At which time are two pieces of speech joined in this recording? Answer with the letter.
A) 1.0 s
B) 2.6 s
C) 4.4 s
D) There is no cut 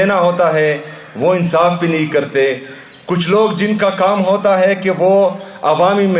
D